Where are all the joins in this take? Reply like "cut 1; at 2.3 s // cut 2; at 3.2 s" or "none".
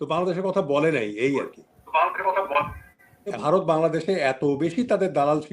cut 1; at 3.3 s